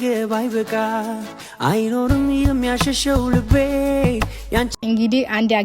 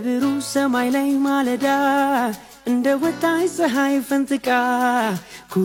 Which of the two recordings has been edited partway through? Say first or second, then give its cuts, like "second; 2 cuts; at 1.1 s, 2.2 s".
first; 1 cut; at 4.7 s